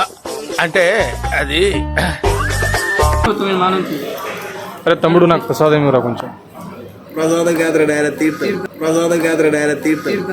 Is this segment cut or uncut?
cut